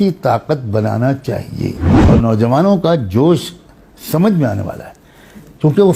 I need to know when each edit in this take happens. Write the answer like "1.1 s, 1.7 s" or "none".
1.9 s